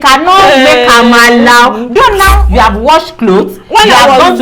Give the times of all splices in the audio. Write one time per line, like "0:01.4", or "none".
0:02.4